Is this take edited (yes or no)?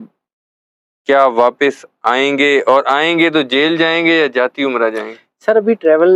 no